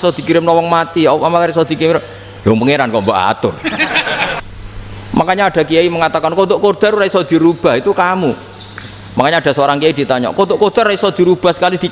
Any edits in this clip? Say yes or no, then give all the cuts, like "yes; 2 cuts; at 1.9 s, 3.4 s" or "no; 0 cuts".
yes; 1 cut; at 4.4 s